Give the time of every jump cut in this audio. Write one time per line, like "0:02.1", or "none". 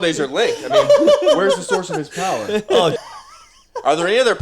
0:03.1